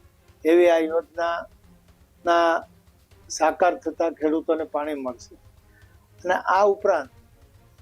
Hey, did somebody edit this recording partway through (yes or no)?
no